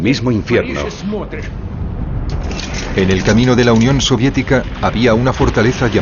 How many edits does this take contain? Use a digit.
1